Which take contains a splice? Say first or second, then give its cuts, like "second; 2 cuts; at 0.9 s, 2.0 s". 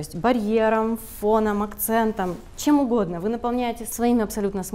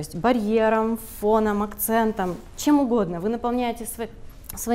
first; 1 cut; at 3.8 s